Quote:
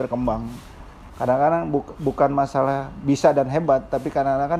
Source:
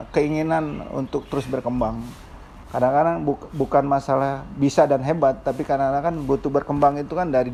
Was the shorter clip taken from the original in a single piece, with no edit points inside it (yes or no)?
yes